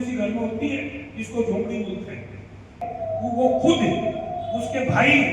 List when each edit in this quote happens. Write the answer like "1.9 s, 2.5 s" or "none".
2.8 s